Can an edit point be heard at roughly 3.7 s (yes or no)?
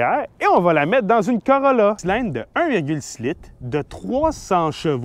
no